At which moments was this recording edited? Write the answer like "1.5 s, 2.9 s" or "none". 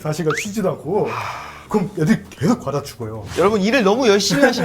3.2 s